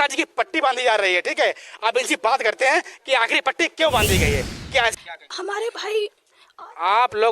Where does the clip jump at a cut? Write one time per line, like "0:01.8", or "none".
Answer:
0:04.9

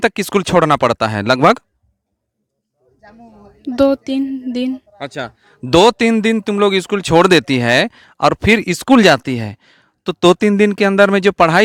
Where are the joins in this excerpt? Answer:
none

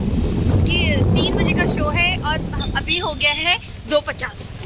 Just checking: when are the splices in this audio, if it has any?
none

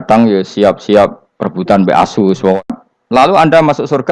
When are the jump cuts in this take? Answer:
0:02.6

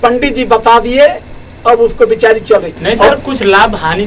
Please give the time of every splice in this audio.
none

